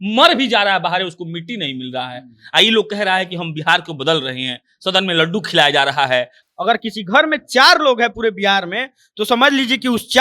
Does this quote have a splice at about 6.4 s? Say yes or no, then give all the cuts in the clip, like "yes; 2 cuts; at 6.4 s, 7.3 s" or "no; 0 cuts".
yes; 1 cut; at 6.4 s